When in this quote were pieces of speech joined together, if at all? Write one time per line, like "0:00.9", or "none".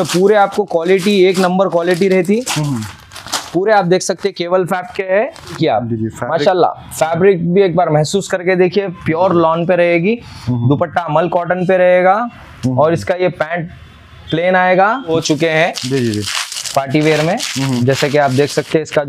0:05.6
0:15.1